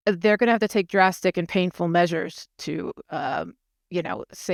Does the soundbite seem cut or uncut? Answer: uncut